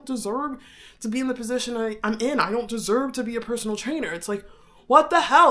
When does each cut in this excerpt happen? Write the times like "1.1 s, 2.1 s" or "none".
none